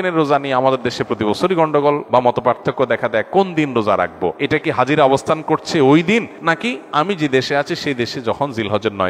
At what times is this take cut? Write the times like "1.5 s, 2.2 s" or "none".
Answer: 2.0 s, 4.4 s, 6.5 s

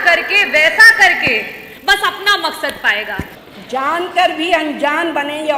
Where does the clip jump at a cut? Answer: 3.3 s

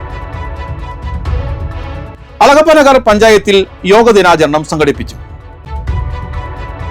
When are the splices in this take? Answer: none

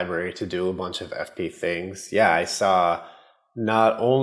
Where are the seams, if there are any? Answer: none

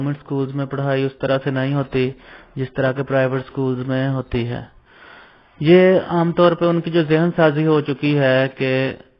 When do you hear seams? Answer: none

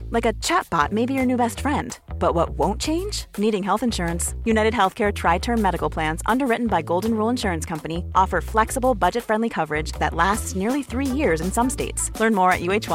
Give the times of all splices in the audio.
none

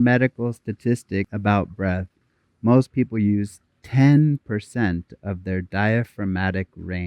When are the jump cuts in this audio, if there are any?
1.3 s

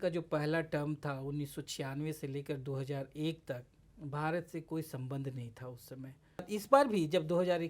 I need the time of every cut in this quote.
6.5 s

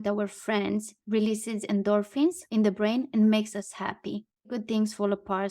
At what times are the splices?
1.0 s, 4.4 s

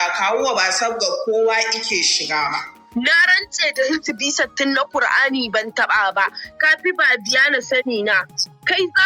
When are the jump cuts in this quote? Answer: 2.8 s, 6.6 s

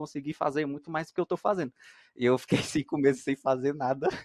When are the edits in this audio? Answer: none

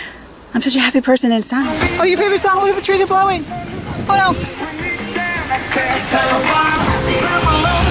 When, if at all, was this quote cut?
1.8 s

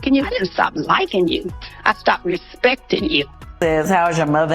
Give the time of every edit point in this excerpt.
3.4 s

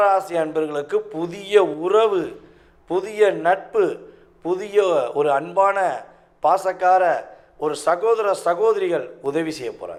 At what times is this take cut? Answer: none

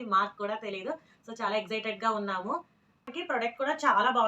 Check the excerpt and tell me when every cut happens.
3.1 s

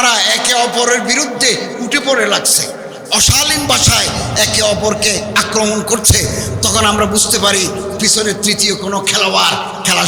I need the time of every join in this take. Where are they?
none

